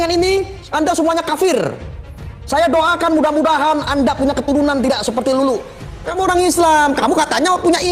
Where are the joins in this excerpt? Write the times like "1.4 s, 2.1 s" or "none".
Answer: 6.1 s